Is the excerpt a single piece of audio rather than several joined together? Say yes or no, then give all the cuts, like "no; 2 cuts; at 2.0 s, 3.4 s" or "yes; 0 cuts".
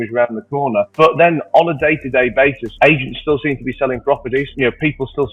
yes; 0 cuts